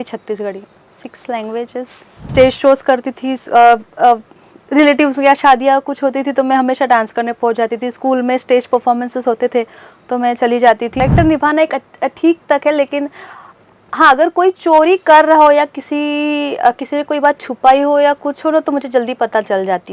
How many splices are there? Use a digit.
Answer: 2